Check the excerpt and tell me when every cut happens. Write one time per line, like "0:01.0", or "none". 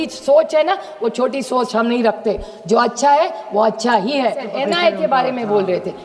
0:04.5